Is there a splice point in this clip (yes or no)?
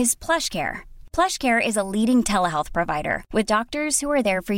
no